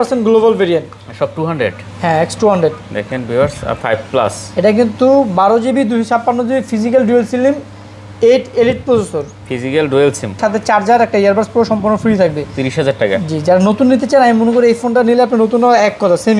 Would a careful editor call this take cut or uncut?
cut